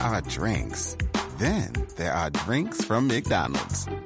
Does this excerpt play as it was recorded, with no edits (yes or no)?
yes